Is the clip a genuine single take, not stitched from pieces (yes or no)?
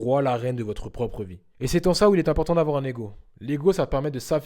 no